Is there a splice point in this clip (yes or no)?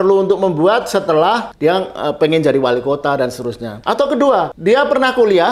yes